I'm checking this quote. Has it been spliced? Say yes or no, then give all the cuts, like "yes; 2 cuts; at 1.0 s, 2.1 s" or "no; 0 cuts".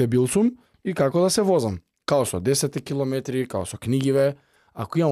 no; 0 cuts